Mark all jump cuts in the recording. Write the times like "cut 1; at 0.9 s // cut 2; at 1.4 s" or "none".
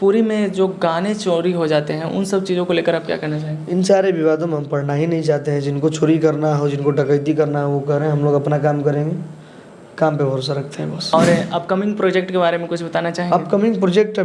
cut 1; at 11.1 s